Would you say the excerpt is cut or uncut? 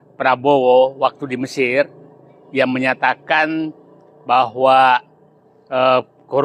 uncut